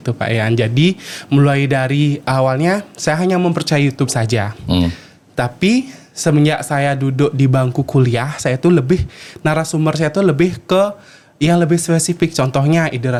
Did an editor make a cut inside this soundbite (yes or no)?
no